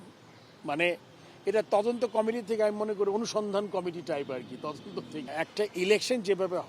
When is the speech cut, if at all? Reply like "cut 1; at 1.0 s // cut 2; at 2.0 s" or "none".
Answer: cut 1; at 5.3 s